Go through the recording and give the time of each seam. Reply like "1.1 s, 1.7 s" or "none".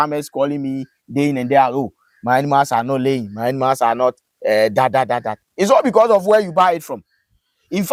none